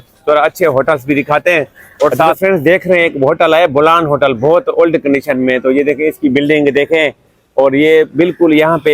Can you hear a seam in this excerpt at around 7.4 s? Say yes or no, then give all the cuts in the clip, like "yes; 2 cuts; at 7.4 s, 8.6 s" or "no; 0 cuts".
no; 1 cut; at 2.4 s